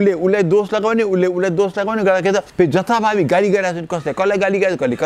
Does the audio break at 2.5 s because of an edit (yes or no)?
yes